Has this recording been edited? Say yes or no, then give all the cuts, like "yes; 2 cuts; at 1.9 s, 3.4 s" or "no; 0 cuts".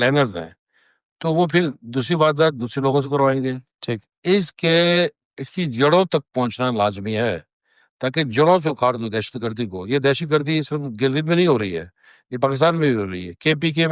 no; 0 cuts